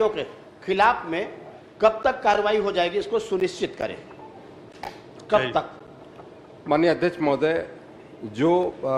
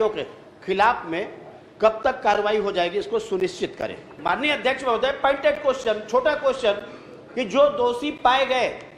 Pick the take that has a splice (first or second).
second